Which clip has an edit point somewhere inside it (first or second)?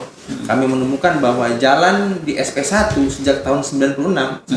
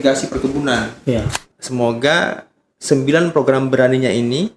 second